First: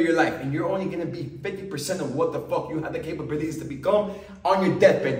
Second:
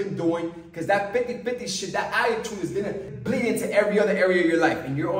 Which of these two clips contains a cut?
second; 1 cut; at 3.1 s

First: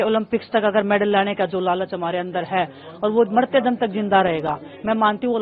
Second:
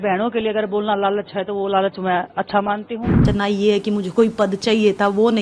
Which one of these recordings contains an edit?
second; 1 cut; at 3.2 s

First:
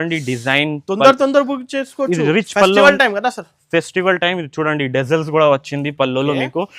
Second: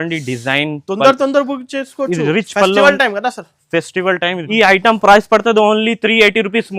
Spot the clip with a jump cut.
second; 1 cut; at 4.4 s

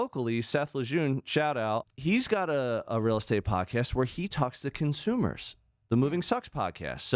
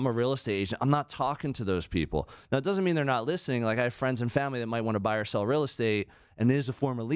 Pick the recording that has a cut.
first; 1 cut; at 1.9 s

